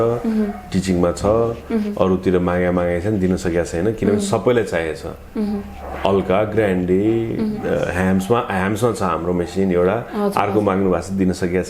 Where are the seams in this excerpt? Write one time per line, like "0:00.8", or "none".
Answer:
none